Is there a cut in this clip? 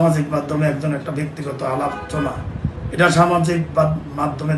no; 0 cuts

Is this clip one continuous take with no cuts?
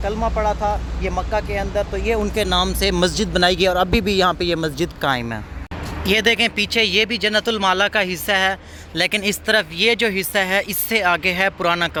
yes; 0 cuts

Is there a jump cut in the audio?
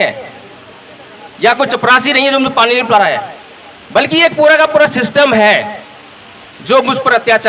no; 0 cuts

